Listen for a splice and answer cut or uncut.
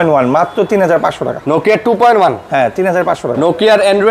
uncut